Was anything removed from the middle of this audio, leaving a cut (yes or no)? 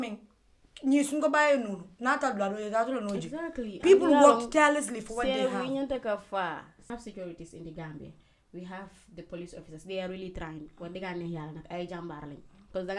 yes